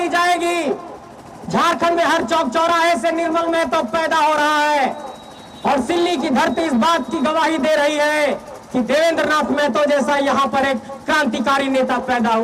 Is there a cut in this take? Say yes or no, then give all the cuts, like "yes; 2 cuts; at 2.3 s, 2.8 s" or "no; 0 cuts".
no; 0 cuts